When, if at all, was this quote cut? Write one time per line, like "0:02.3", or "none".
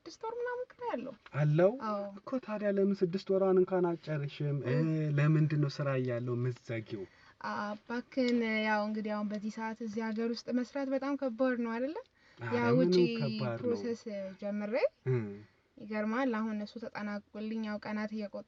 none